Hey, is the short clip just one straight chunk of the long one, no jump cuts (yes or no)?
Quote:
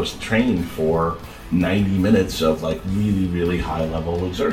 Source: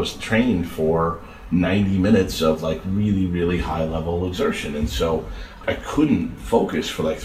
yes